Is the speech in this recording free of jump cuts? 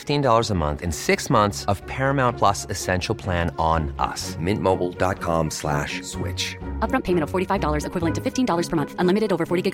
yes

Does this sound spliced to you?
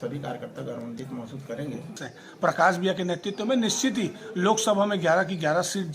yes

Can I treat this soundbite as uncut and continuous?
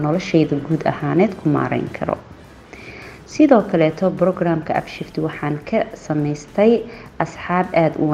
yes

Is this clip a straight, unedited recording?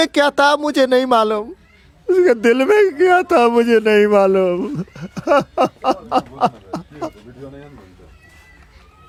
yes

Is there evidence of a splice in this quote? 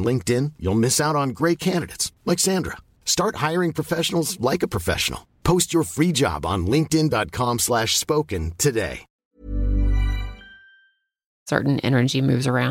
yes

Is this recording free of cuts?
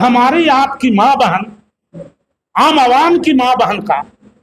yes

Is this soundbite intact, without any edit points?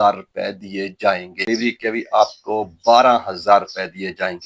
no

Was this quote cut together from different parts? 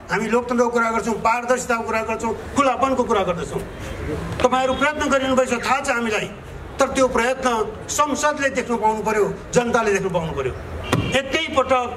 no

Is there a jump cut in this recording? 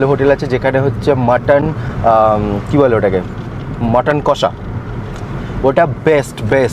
no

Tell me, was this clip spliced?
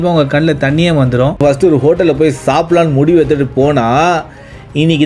yes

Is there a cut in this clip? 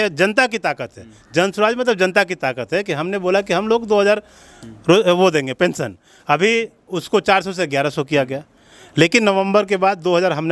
no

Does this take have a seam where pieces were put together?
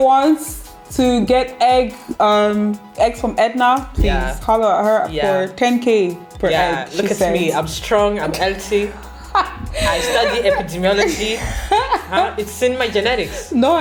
no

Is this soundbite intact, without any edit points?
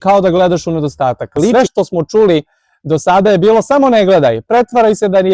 no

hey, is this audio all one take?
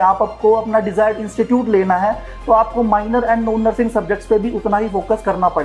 yes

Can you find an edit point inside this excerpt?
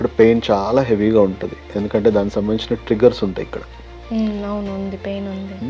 no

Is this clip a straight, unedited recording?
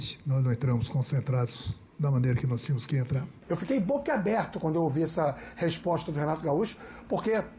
no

